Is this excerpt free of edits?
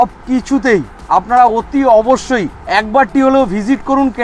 no; 2 cuts; at 0.9 s, 2.6 s

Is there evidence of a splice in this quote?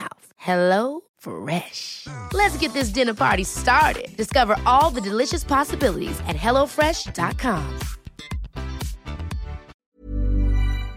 yes; 1 cut; at 9.9 s

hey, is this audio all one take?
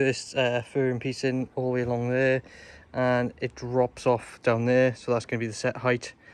yes; 0 cuts

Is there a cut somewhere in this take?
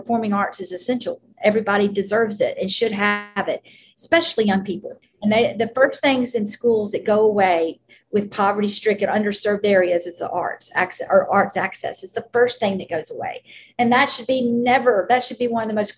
yes; 1 cut; at 5.0 s

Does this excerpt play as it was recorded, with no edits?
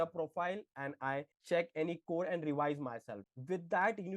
no; 1 cut; at 3.2 s

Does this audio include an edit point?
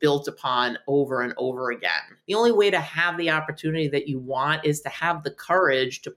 yes; 1 cut; at 2.1 s

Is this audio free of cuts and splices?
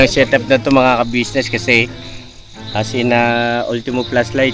yes; 0 cuts

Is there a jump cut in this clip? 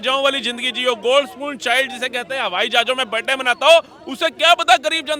no; 0 cuts

